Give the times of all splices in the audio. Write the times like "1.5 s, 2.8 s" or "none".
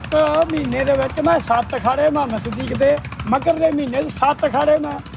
none